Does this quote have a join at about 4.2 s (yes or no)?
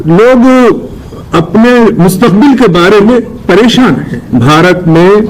yes